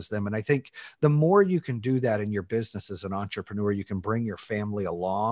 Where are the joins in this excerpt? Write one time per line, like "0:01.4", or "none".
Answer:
none